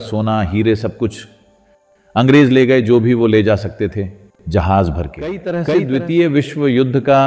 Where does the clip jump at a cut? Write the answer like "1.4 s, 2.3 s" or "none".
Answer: 5.6 s